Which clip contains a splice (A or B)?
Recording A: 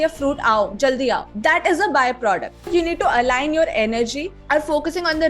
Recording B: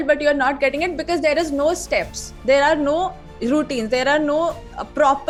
A